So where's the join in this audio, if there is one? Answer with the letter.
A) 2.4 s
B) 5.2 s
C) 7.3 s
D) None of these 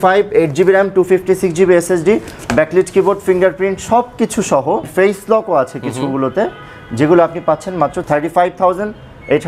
D